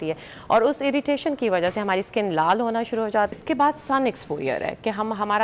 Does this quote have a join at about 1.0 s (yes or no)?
no